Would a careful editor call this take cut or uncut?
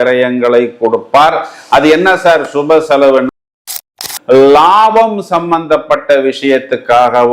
cut